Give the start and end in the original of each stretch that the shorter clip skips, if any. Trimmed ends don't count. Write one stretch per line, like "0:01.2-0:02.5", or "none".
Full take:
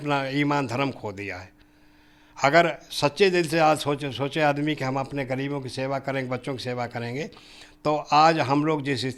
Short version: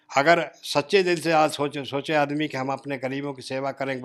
none